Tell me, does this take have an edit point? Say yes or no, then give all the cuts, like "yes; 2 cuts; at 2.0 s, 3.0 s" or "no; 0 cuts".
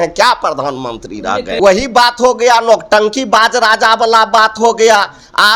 yes; 1 cut; at 1.5 s